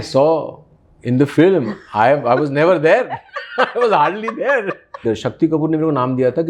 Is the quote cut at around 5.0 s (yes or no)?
yes